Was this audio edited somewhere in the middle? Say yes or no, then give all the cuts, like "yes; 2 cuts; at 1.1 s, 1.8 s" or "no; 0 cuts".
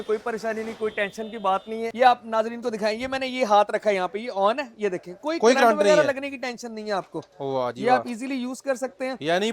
yes; 1 cut; at 1.9 s